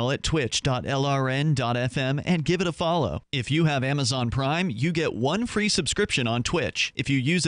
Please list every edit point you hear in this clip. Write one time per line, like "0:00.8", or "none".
none